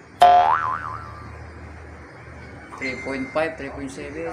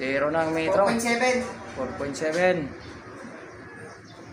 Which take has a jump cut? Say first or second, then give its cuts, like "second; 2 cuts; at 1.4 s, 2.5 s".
first; 1 cut; at 1.0 s